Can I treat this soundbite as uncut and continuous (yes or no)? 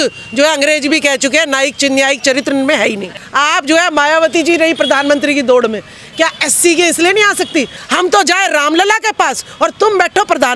no